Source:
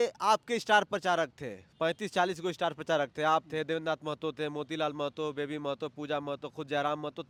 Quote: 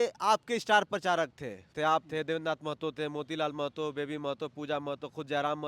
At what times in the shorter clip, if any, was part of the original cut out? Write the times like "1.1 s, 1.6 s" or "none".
1.7 s